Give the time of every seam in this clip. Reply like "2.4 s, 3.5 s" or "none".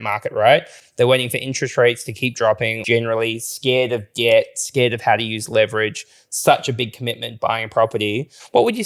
2.8 s